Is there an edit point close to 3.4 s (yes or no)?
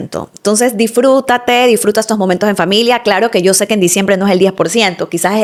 no